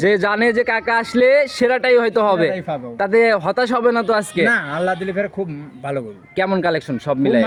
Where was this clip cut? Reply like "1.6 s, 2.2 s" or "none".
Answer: none